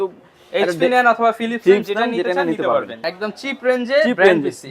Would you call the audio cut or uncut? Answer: cut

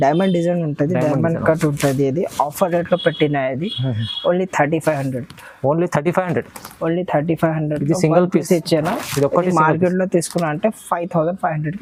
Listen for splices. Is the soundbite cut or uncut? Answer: uncut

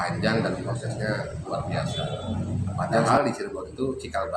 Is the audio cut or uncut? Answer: cut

